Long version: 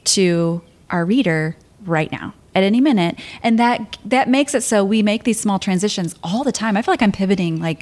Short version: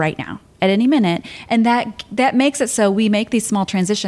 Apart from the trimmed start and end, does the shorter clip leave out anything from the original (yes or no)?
no